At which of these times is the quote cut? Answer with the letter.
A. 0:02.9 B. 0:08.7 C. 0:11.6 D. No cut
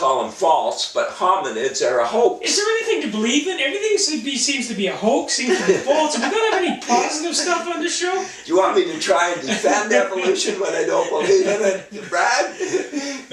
C